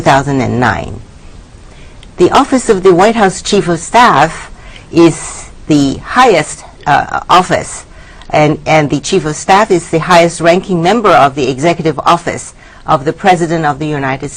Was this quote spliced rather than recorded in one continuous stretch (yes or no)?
yes